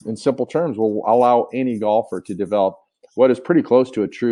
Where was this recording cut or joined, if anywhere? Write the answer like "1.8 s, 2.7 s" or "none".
none